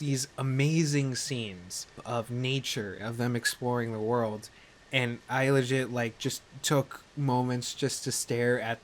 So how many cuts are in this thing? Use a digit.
1